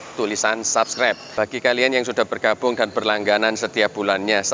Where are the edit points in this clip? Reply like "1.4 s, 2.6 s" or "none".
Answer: 1.2 s

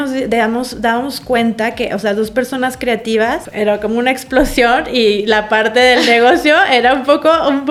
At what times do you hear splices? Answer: none

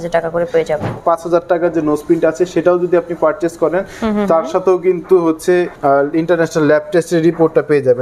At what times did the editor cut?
1.0 s, 5.7 s

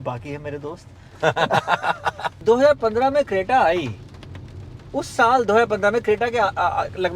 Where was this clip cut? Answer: 2.4 s

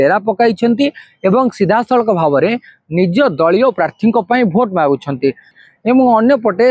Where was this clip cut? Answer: 5.5 s

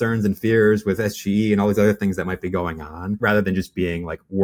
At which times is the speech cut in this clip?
none

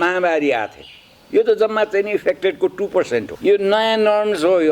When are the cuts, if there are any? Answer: 3.3 s

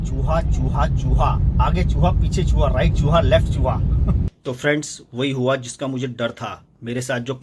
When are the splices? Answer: 4.3 s

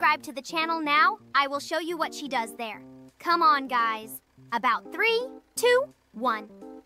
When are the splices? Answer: none

